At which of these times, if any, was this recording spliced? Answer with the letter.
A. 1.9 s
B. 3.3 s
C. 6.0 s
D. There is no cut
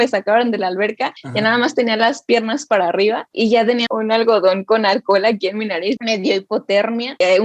C